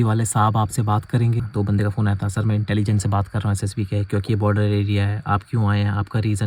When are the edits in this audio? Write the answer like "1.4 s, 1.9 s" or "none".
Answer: 1.5 s